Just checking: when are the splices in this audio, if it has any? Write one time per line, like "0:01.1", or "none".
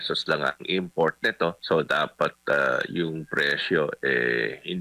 0:01.6